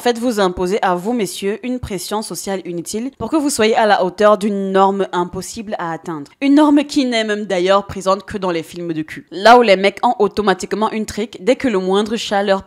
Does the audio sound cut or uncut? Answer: uncut